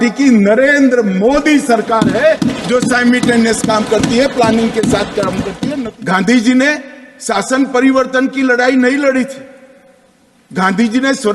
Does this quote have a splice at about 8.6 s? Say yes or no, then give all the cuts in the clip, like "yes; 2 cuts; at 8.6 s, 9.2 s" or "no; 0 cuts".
no; 1 cut; at 5.6 s